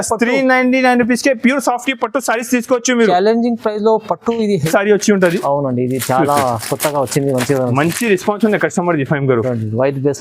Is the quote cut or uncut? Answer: cut